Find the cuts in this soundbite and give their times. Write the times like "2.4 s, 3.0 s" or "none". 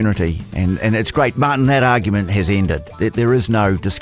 1.3 s